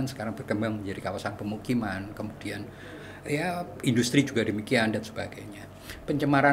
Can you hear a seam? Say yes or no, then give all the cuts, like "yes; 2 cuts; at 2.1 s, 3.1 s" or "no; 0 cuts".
no; 0 cuts